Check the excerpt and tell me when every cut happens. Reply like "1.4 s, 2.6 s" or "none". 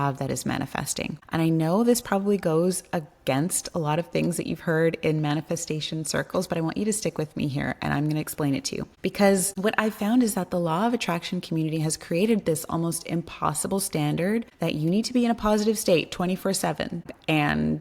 1.2 s, 8.9 s, 9.5 s, 14.5 s, 17.0 s